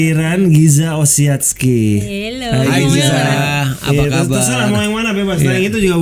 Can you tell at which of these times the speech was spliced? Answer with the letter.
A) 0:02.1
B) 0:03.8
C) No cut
C